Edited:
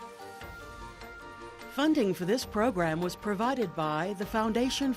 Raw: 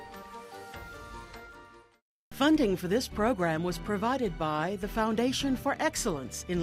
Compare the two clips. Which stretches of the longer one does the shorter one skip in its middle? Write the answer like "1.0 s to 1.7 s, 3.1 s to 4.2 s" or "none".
2.0 s to 2.3 s